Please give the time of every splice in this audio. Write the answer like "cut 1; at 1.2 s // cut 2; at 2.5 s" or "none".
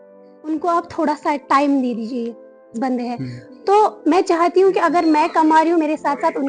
cut 1; at 2.8 s